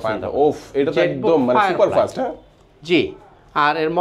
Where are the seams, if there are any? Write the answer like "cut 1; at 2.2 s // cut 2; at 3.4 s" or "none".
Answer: none